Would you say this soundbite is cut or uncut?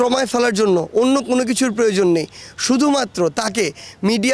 uncut